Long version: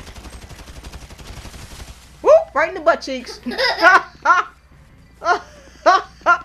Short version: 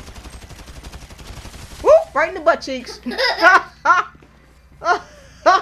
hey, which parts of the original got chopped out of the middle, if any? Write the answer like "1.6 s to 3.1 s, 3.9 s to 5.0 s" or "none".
1.8 s to 2.2 s